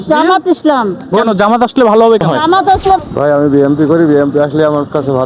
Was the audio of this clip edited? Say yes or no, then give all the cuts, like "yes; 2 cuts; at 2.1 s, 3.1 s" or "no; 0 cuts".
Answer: yes; 1 cut; at 3.0 s